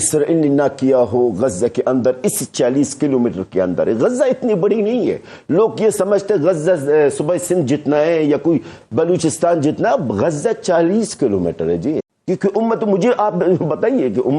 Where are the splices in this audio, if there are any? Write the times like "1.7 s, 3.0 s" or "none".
12.1 s